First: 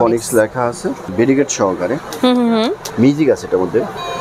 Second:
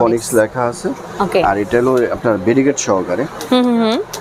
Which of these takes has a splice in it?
first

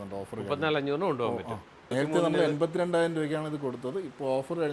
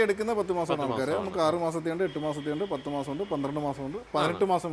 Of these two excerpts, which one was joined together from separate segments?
first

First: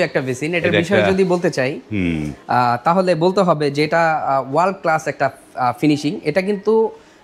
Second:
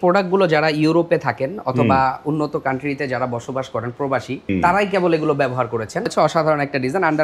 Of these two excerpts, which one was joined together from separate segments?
second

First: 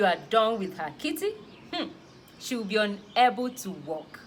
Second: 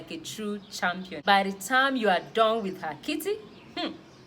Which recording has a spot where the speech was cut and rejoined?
second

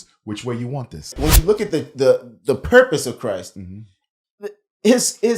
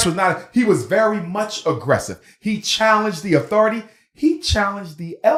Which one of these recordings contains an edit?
first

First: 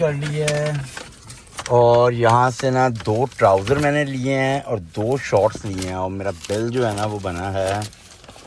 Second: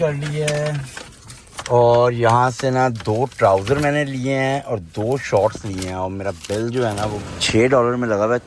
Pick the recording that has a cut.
second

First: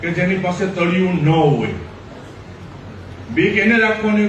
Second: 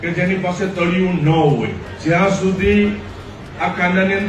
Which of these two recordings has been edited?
second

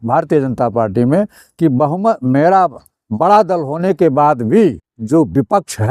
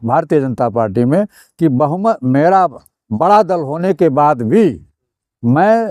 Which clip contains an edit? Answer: first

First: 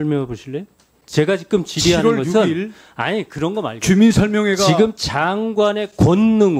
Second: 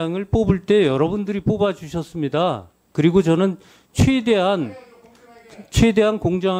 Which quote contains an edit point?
first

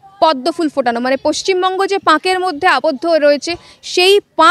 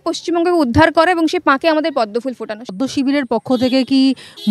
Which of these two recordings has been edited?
second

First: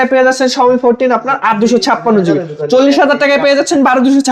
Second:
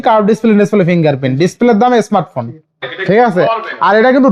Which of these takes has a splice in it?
second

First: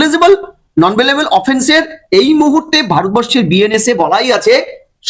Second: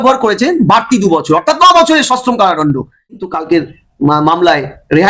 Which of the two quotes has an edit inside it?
second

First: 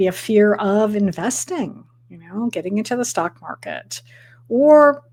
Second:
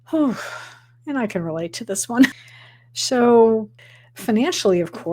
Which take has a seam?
second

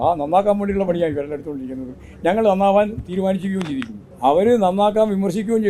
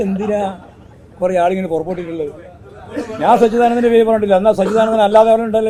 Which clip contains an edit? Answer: first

